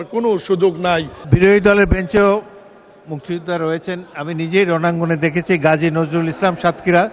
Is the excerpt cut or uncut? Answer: cut